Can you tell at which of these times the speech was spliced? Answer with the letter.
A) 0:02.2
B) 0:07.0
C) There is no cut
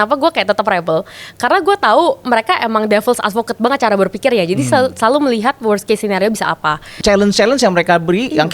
B